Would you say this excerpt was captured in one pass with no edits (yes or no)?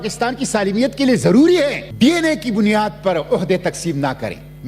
no